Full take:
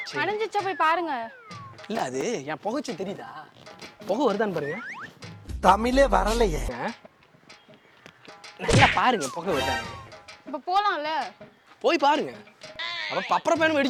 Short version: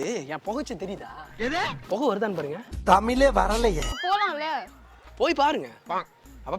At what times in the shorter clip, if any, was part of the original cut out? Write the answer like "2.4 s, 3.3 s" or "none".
2.6 s, 3.9 s

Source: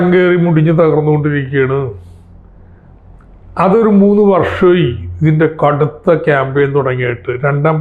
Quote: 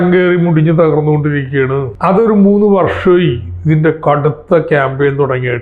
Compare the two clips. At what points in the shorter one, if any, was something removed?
1.9 s

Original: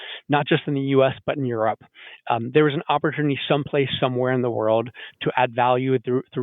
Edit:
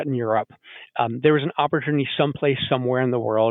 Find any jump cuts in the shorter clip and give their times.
none

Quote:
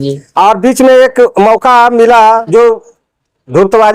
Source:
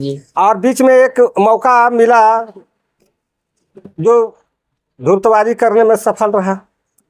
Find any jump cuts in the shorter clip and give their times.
2.4 s

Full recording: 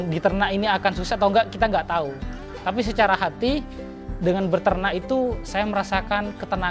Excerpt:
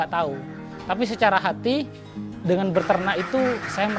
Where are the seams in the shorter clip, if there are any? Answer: none

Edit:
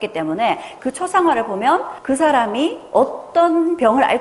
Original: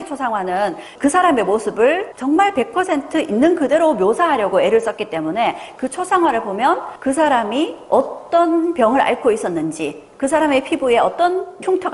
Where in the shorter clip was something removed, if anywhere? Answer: none

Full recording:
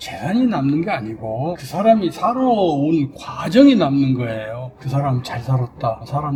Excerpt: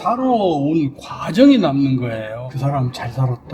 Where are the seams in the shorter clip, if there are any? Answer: 2.5 s

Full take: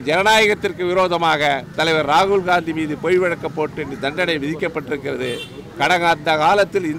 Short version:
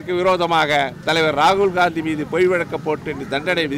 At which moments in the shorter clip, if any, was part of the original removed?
none

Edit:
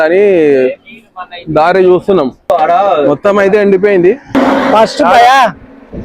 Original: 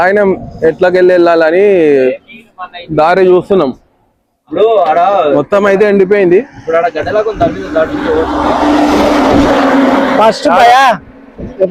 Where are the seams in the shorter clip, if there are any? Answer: 2.5 s, 4.3 s

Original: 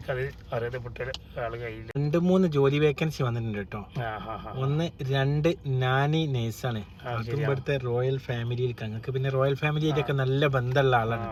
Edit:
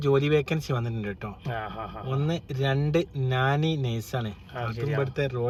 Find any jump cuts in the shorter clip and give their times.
none

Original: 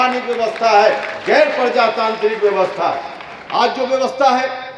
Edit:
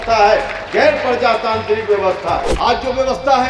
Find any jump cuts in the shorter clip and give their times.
2.5 s

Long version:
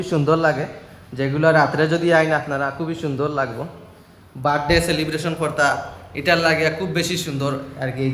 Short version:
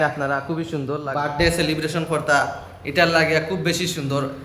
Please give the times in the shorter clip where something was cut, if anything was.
1.1 s

